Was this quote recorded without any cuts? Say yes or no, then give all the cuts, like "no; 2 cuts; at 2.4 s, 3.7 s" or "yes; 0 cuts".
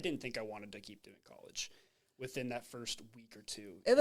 yes; 0 cuts